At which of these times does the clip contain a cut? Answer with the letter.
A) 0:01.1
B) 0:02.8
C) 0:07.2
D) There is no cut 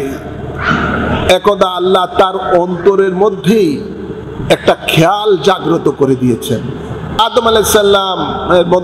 C